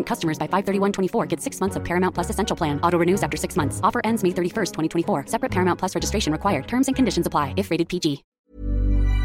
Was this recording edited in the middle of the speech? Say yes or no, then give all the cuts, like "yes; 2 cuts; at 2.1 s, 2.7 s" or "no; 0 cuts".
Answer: yes; 1 cut; at 8.3 s